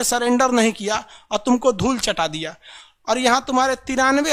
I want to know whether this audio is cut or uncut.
uncut